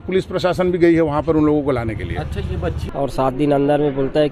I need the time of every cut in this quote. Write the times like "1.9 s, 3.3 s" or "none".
2.8 s